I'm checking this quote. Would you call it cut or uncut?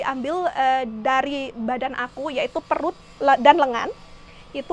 uncut